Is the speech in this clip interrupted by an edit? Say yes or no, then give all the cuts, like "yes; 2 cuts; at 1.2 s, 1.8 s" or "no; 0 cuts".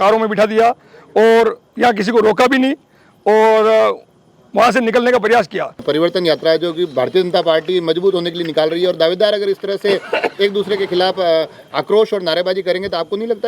yes; 1 cut; at 5.8 s